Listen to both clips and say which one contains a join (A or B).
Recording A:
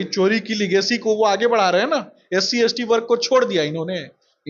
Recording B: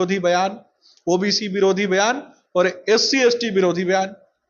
A